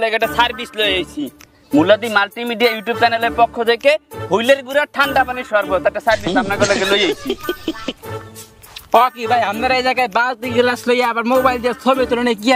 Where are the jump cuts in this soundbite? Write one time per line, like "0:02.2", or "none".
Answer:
0:08.0